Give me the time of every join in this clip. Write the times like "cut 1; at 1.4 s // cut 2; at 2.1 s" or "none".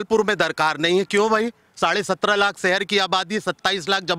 none